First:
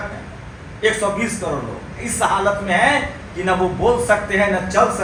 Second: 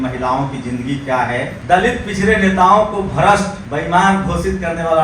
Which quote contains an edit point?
second; 2 cuts; at 1.6 s, 3.6 s

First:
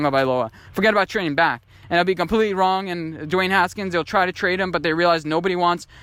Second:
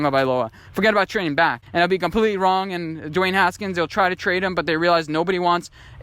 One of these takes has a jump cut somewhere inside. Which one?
second; 1 cut; at 1.6 s

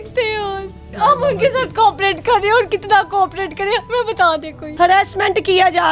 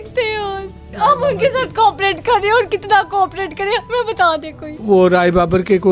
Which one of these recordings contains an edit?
first; 1 cut; at 4.7 s

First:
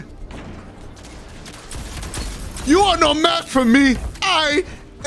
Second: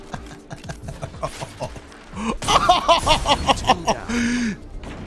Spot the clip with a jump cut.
first; 2 cuts; at 2.6 s, 4.1 s

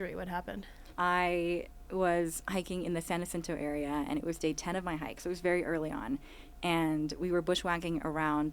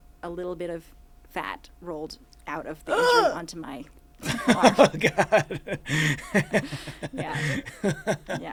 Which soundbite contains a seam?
first; 1 cut; at 0.9 s

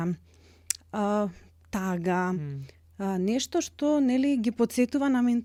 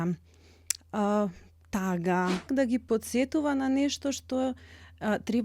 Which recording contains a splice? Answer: second; 1 cut; at 2.5 s

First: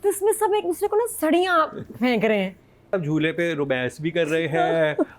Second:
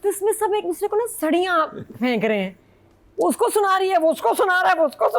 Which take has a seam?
first; 1 cut; at 2.9 s

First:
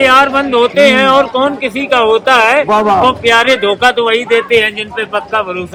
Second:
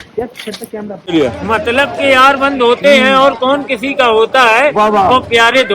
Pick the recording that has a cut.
second; 1 cut; at 1.1 s

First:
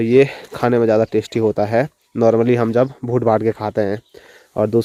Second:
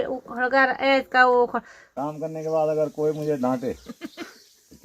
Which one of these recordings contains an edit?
second; 1 cut; at 1.8 s

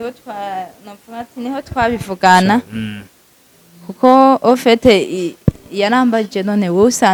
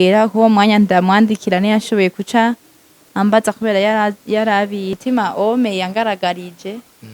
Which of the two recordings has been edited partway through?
second; 1 cut; at 5.0 s

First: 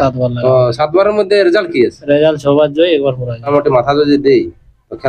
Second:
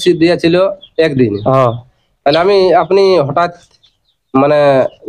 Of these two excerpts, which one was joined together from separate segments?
first; 1 cut; at 3.5 s

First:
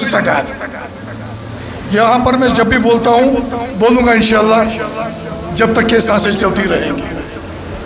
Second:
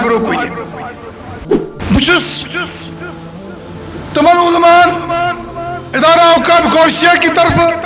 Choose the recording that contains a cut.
second; 1 cut; at 1.8 s

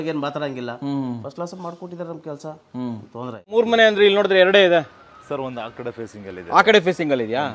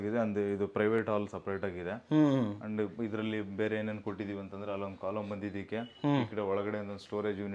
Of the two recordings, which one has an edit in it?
first; 1 cut; at 3.5 s

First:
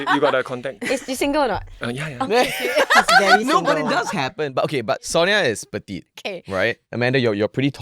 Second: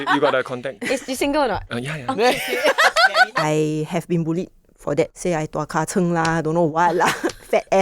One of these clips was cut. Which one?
second; 3 cuts; at 1.7 s, 3.3 s, 5.1 s

